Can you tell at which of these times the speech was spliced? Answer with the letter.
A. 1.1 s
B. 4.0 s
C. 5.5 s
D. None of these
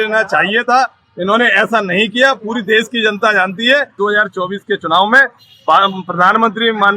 B